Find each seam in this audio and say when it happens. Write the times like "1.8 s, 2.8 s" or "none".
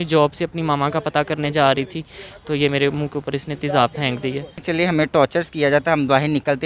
4.6 s